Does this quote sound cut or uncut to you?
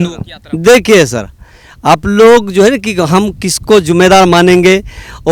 uncut